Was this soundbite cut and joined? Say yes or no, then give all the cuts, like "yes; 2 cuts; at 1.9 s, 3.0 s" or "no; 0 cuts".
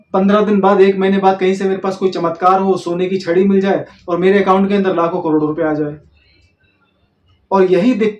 no; 0 cuts